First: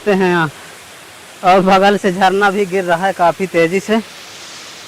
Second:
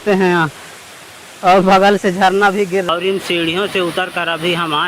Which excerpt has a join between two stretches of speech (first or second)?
second